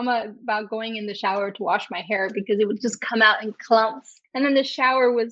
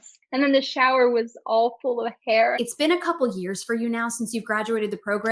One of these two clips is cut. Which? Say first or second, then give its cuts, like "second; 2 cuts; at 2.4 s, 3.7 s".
second; 1 cut; at 2.6 s